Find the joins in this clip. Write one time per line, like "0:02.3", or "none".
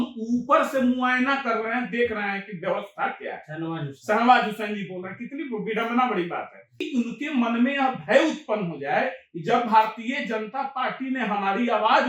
0:06.9